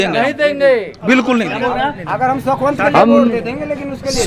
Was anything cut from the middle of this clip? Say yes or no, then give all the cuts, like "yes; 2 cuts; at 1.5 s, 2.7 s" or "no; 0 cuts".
no; 0 cuts